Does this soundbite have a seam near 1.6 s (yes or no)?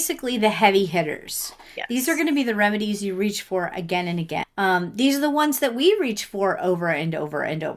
no